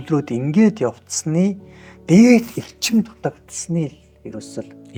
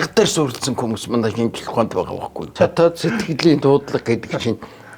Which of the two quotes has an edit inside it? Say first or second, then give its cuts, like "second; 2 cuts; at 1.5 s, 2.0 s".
second; 1 cut; at 2.5 s